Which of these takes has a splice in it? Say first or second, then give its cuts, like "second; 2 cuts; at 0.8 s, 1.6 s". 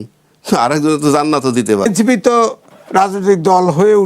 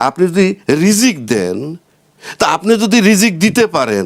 first; 1 cut; at 1.9 s